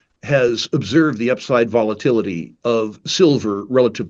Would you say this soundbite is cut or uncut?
cut